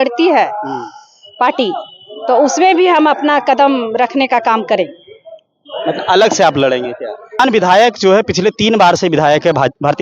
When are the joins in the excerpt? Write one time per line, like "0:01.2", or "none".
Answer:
0:07.4